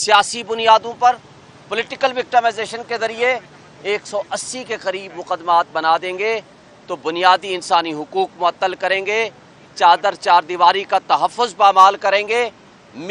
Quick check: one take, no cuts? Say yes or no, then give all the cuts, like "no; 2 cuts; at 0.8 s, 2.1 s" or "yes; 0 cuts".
yes; 0 cuts